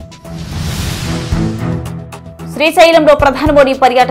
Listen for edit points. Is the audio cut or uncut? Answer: cut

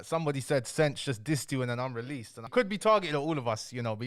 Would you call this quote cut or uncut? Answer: cut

